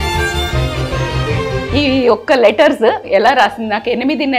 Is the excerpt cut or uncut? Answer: cut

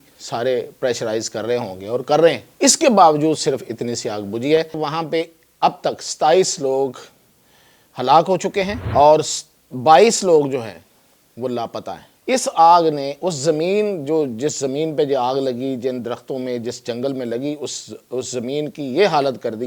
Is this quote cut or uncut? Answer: cut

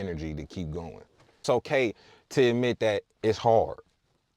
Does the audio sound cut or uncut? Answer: cut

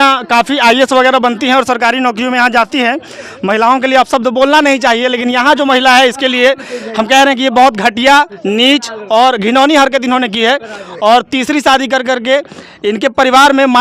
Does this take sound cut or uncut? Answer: uncut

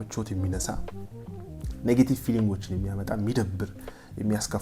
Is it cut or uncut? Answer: uncut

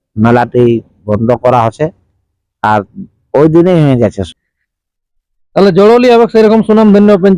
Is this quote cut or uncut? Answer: cut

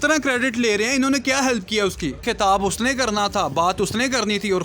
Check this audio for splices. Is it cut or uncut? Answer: cut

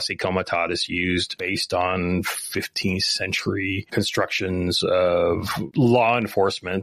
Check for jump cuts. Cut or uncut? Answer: cut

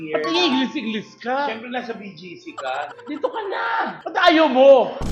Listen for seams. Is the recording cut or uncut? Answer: cut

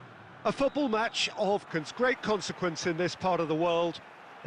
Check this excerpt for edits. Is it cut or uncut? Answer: cut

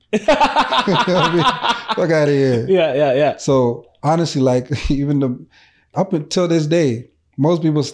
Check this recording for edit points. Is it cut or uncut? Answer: uncut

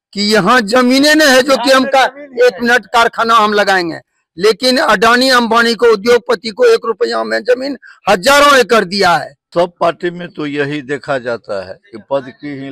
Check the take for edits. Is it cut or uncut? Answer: cut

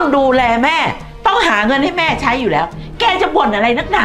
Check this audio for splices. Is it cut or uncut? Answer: uncut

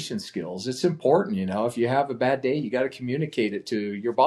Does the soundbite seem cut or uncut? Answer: uncut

